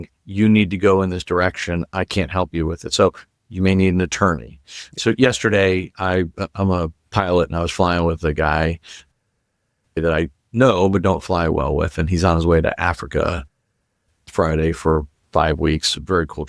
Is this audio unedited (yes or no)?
no